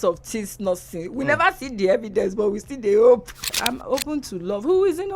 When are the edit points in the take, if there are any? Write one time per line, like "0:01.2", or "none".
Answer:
0:03.3